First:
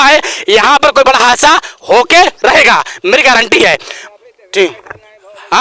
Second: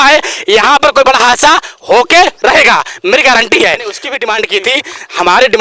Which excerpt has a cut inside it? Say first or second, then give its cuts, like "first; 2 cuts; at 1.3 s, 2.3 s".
second; 1 cut; at 4.1 s